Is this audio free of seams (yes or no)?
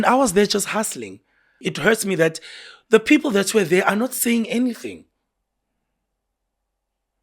no